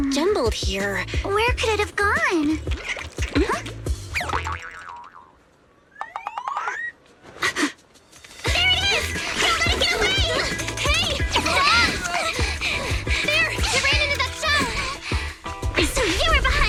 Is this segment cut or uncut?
uncut